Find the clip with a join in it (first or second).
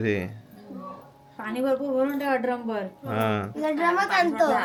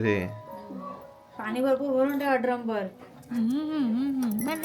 second